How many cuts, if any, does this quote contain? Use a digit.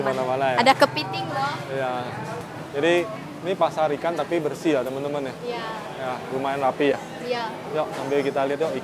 1